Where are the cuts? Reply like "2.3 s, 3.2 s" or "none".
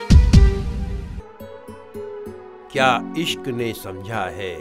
1.0 s